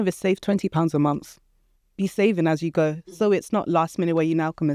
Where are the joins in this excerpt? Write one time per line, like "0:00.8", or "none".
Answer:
none